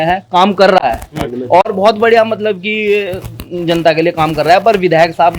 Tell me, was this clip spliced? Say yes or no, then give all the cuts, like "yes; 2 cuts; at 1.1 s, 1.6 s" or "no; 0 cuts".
no; 0 cuts